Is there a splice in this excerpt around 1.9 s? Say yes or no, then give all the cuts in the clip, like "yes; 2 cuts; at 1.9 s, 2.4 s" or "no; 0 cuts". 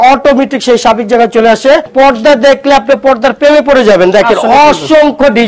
yes; 1 cut; at 1.9 s